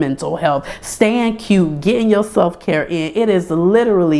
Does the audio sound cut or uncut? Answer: uncut